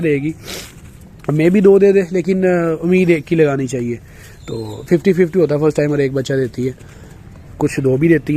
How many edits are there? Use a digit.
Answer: 0